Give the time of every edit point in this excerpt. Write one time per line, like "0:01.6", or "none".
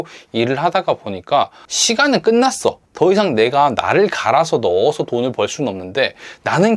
0:01.7
0:02.9